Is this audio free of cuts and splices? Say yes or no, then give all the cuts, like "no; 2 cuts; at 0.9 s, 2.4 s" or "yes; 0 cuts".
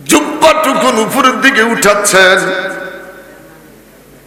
yes; 0 cuts